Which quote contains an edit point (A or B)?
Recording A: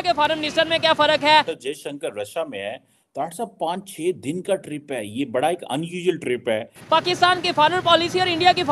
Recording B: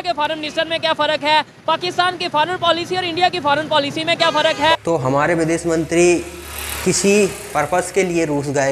A